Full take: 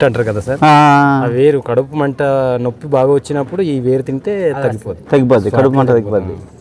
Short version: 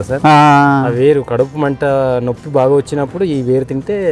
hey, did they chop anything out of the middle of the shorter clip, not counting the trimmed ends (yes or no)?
no